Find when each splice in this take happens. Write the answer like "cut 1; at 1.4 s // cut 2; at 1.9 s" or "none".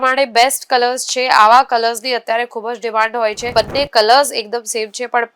cut 1; at 3.5 s